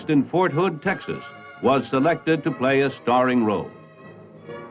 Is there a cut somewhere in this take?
yes; 1 cut; at 3.2 s

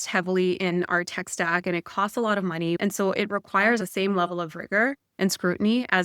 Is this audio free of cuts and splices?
no; 2 cuts; at 2.8 s, 3.8 s

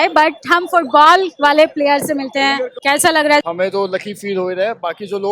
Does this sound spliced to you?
yes; 1 cut; at 3.4 s

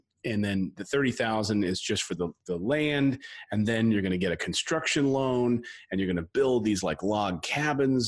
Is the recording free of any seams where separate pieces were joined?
yes; 0 cuts

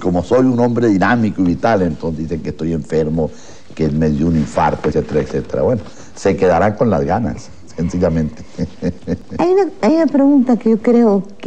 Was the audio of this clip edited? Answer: no; 0 cuts

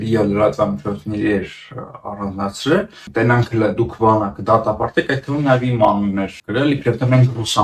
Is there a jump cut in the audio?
yes; 2 cuts; at 3.0 s, 6.4 s

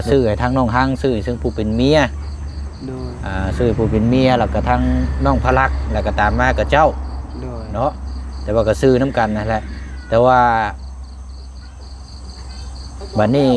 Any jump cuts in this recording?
no; 0 cuts

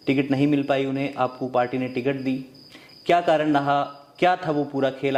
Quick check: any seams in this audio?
no; 0 cuts

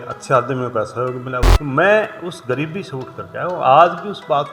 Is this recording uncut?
no; 1 cut; at 1.5 s

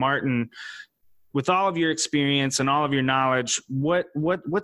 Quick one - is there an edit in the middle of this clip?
no; 0 cuts

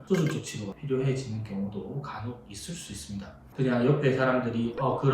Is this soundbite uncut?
no; 1 cut; at 3.4 s

